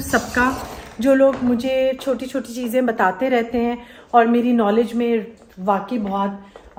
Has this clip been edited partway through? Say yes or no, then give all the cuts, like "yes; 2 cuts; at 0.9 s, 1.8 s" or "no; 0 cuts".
no; 0 cuts